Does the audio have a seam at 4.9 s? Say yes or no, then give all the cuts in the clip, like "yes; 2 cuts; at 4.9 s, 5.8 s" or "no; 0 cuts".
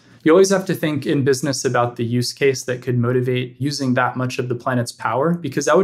no; 1 cut; at 3.5 s